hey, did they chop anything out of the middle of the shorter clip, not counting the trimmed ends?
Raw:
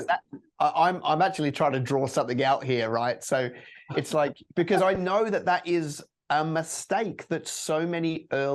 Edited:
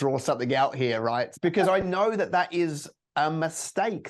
yes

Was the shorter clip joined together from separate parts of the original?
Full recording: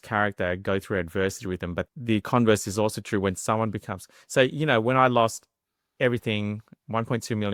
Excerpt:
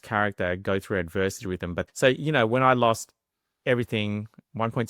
yes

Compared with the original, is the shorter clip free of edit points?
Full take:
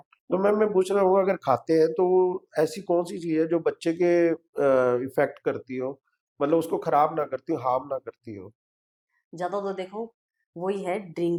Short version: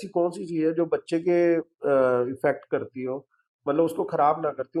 yes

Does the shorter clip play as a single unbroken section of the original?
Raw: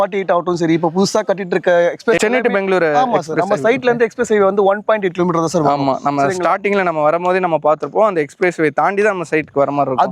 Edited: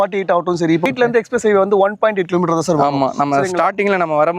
no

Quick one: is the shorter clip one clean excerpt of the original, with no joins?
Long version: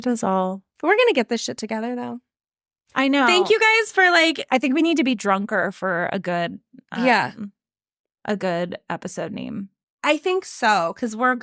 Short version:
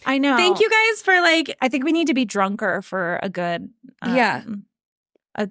yes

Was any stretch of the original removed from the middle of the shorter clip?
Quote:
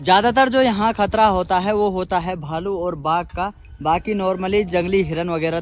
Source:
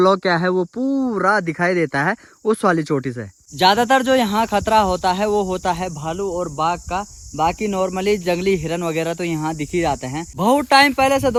no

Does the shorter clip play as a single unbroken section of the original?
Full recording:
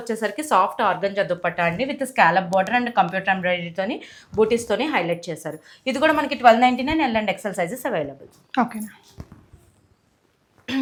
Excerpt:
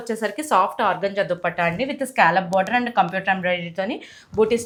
yes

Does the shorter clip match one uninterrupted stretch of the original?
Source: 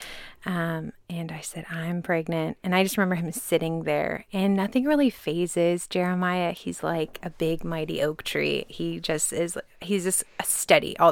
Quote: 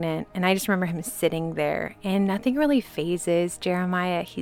yes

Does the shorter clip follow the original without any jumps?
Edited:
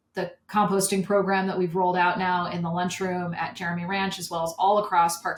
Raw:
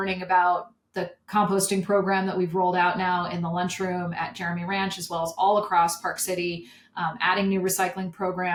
yes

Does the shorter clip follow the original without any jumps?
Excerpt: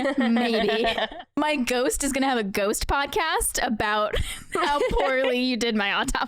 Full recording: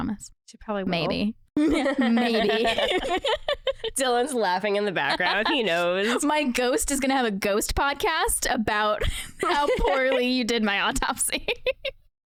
no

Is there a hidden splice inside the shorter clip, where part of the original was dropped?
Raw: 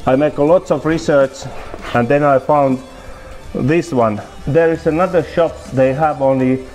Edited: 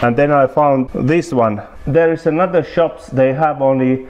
yes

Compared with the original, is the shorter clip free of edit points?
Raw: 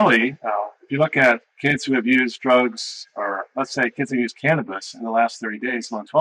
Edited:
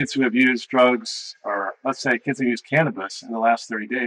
yes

